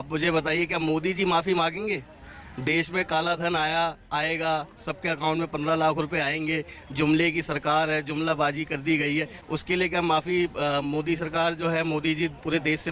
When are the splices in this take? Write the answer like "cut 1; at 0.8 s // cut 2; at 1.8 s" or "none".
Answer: none

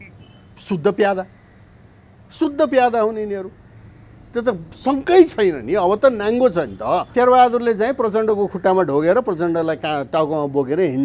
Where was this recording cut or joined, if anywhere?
cut 1; at 7.1 s

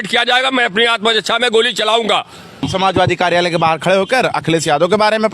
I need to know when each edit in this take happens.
cut 1; at 2.7 s

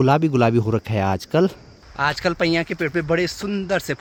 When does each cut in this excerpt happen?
none

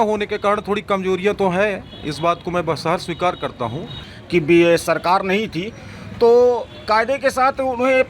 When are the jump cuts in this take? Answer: cut 1; at 3.9 s

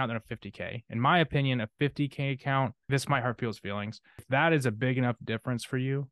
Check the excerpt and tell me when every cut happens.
cut 1; at 2.8 s // cut 2; at 4.2 s

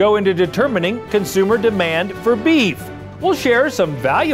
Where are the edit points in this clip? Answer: cut 1; at 3.1 s

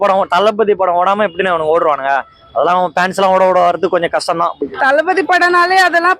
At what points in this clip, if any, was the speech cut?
cut 1; at 4.6 s

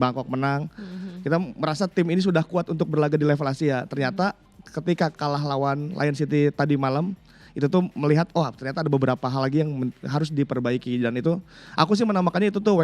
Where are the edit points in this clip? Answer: none

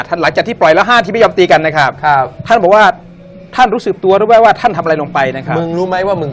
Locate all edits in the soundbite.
none

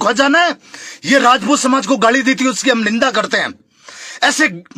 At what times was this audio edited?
none

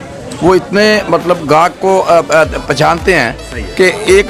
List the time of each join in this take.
none

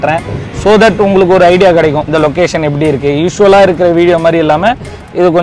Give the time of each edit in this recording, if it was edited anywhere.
cut 1; at 2.1 s

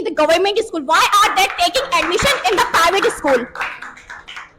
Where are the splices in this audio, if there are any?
none

